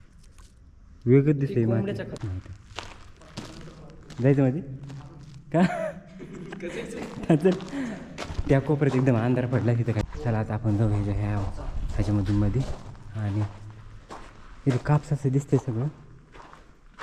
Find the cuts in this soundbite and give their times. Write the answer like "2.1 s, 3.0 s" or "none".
2.2 s, 10.0 s

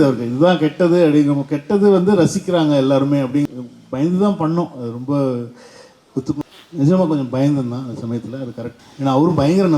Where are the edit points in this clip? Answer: 3.5 s, 6.4 s, 8.6 s

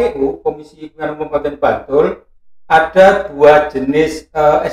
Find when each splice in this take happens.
none

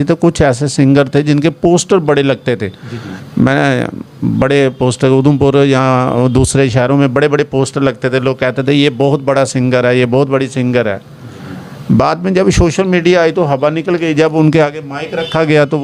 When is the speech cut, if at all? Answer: none

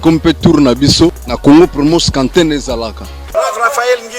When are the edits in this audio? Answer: 1.3 s, 3.2 s

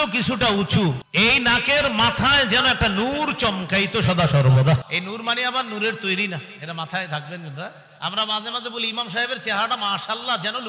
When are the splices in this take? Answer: 1.0 s, 4.9 s

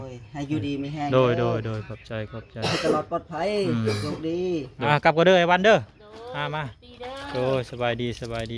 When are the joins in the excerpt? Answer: 4.8 s

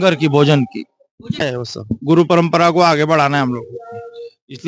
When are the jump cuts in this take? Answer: 1.4 s

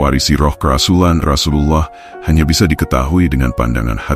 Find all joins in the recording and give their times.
1.2 s

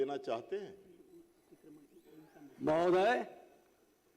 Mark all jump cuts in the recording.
none

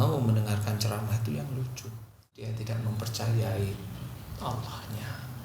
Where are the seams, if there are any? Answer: 2.3 s

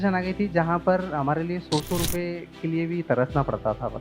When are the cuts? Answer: none

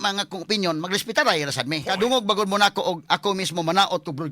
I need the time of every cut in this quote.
1.9 s

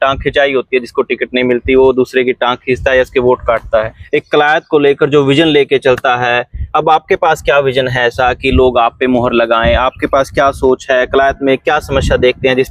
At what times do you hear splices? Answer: 4.0 s

